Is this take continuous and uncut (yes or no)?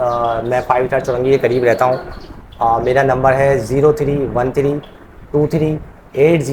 yes